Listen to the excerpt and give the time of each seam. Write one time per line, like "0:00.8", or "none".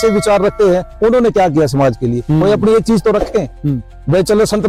none